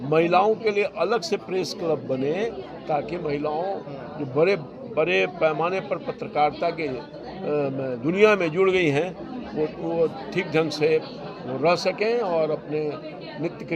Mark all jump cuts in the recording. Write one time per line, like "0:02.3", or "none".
none